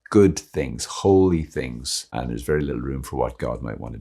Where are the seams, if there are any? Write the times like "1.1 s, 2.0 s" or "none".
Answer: 2.1 s